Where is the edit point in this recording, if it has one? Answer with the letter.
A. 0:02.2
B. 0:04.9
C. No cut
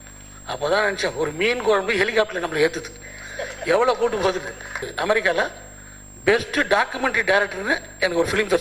B